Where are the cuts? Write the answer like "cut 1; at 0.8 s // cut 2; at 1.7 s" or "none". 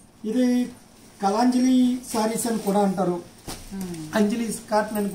none